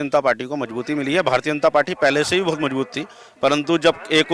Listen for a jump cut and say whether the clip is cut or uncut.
uncut